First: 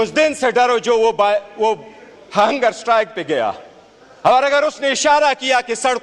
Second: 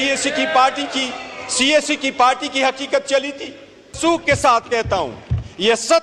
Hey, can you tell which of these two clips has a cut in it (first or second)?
second